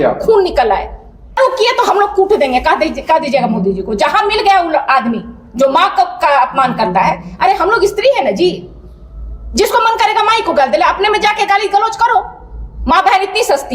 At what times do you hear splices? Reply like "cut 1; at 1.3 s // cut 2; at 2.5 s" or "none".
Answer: cut 1; at 1.4 s